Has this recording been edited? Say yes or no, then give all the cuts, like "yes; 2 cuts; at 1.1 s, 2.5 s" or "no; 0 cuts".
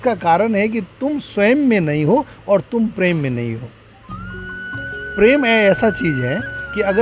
no; 0 cuts